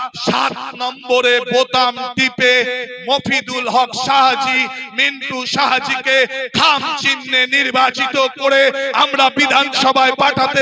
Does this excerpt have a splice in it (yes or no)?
no